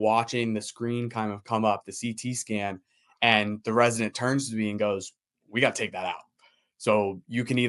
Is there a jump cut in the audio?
no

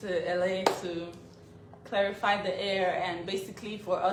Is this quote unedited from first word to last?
yes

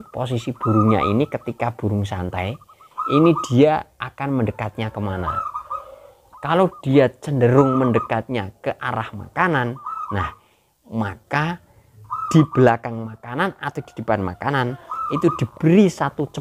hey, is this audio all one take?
yes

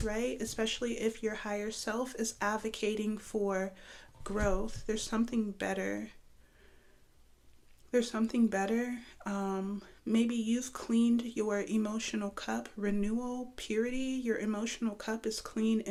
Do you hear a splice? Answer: no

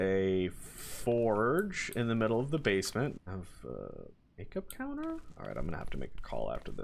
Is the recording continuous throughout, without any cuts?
no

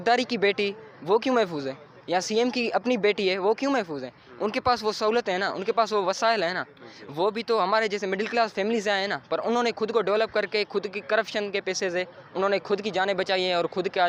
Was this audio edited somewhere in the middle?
no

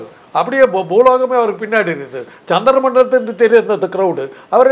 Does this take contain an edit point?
no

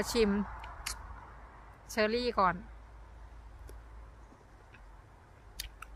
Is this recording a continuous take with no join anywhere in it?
yes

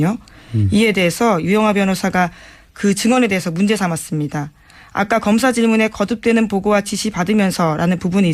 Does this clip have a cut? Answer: no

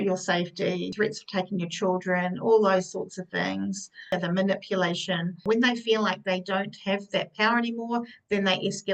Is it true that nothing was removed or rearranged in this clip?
no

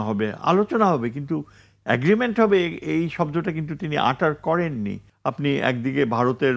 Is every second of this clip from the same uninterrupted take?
no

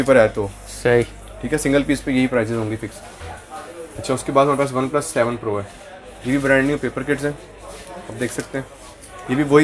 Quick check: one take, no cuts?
yes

